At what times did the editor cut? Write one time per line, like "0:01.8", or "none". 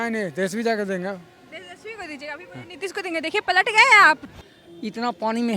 0:04.3